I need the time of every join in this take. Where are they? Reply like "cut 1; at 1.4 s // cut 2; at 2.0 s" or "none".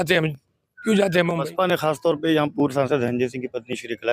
cut 1; at 1.4 s